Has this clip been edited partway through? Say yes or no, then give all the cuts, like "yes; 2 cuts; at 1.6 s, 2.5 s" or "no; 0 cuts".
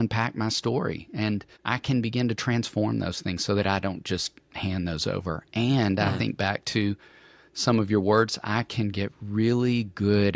yes; 1 cut; at 1.5 s